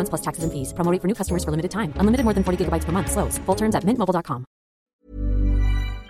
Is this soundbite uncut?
no; 1 cut; at 4.9 s

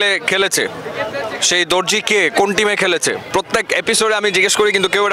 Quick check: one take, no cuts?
no; 1 cut; at 3.2 s

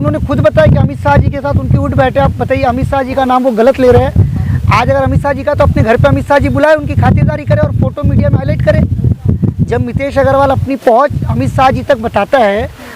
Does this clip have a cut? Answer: no; 0 cuts

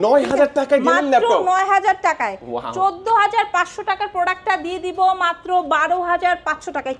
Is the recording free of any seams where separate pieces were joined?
yes; 0 cuts

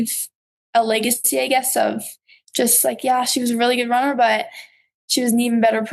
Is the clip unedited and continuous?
yes; 0 cuts

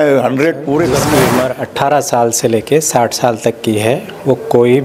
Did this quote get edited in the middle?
yes; 1 cut; at 1.1 s

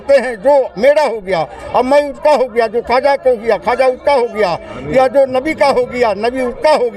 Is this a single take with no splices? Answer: yes; 0 cuts

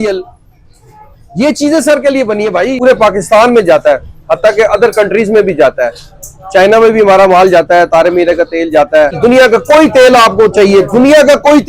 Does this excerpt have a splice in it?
yes; 2 cuts; at 2.8 s, 9.2 s

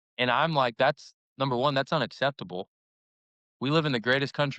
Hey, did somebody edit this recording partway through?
no; 0 cuts

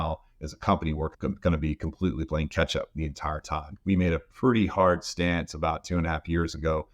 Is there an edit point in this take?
yes; 1 cut; at 3.7 s

